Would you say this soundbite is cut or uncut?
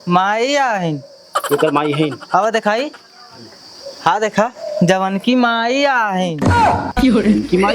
uncut